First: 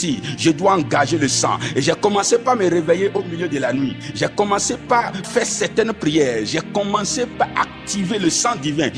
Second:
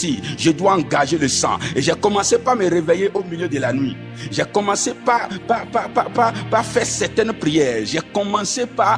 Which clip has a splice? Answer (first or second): first